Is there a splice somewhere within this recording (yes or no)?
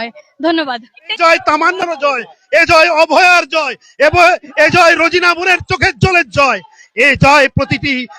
yes